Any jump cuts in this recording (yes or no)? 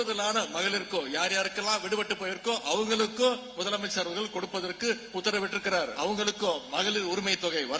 yes